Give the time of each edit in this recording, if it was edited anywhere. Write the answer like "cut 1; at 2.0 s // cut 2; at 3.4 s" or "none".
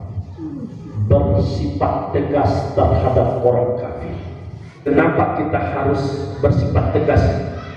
cut 1; at 4.9 s